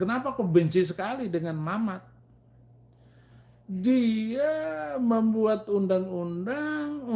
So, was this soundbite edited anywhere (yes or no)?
no